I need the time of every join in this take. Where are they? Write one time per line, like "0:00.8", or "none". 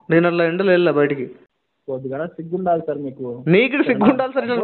0:01.5